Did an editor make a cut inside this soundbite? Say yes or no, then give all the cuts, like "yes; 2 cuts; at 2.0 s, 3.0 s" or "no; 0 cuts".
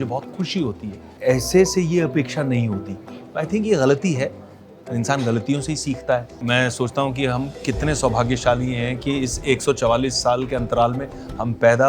yes; 2 cuts; at 1.1 s, 6.3 s